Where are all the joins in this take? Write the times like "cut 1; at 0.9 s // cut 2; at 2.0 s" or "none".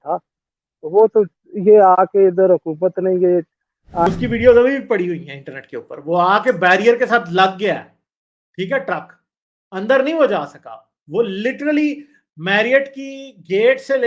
cut 1; at 4.1 s